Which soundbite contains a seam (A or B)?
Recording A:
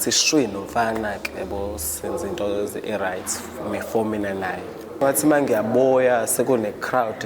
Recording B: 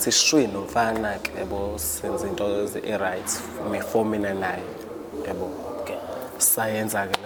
A